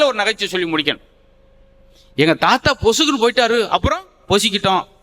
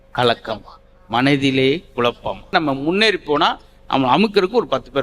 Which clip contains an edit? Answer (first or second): second